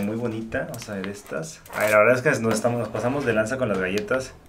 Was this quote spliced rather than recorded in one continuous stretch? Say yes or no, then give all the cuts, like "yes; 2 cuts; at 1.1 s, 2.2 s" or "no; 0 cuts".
yes; 1 cut; at 1.6 s